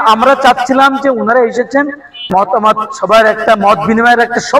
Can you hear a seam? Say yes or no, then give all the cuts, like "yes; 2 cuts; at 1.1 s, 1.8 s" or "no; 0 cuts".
yes; 1 cut; at 2.2 s